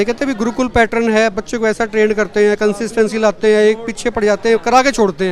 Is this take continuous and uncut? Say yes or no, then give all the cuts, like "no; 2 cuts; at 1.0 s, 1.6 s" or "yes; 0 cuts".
yes; 0 cuts